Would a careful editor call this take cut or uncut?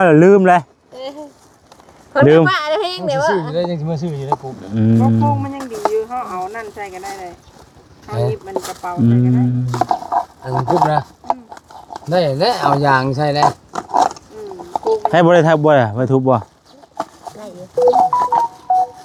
uncut